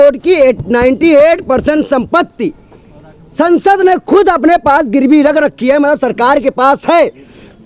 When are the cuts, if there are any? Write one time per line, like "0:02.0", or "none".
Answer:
none

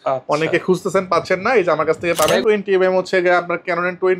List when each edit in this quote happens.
0:02.4

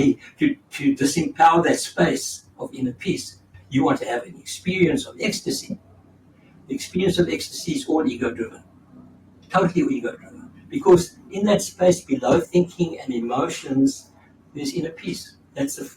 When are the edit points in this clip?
0:03.4

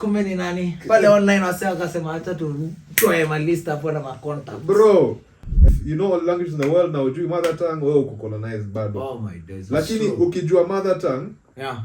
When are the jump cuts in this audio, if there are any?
0:05.7

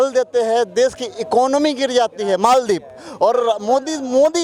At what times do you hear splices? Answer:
none

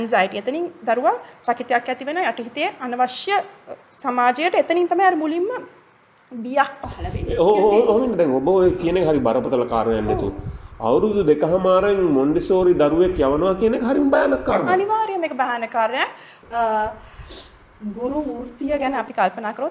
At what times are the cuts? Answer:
0:16.3

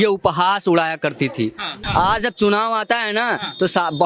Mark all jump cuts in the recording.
0:01.8

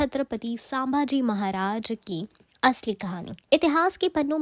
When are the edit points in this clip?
0:02.4
0:03.3

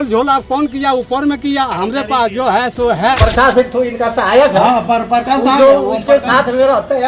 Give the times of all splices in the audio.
0:03.2

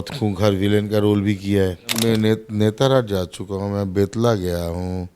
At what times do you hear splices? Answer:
0:01.9

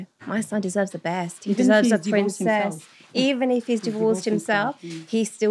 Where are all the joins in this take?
none

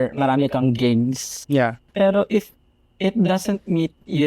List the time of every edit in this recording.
0:01.8

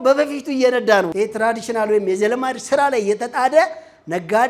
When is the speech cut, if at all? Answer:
0:01.1

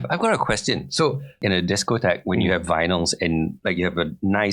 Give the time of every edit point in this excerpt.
0:01.4

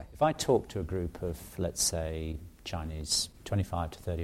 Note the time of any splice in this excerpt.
none

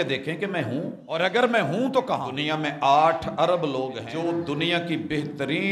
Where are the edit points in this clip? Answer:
0:01.0
0:02.3
0:04.1

